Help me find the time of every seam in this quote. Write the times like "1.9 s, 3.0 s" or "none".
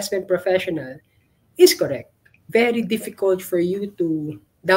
2.4 s